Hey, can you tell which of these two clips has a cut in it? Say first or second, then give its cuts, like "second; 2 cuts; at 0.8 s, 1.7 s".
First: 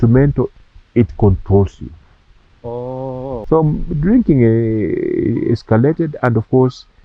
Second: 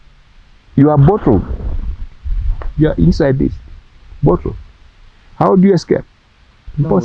first; 1 cut; at 3.4 s